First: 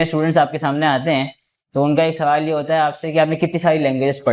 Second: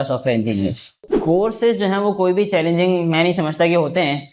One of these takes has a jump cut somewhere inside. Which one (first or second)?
second